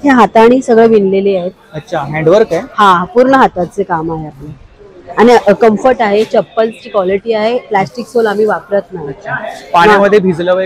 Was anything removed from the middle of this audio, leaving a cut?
no; 0 cuts

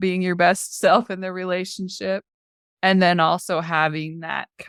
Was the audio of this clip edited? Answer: no; 0 cuts

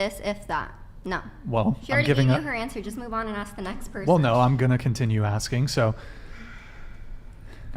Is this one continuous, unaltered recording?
yes; 0 cuts

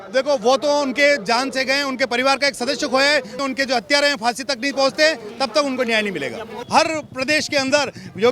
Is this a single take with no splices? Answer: no; 2 cuts; at 3.4 s, 6.6 s

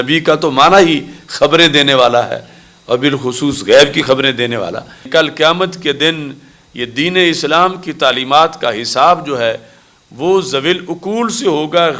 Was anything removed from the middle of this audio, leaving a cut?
yes; 1 cut; at 5.0 s

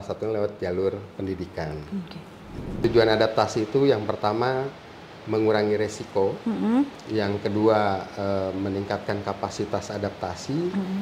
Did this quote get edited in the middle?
yes; 1 cut; at 2.8 s

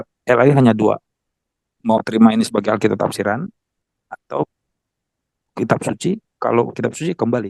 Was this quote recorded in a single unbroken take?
yes; 0 cuts

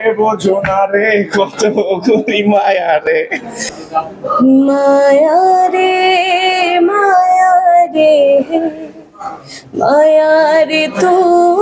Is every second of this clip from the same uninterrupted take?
no; 1 cut; at 3.6 s

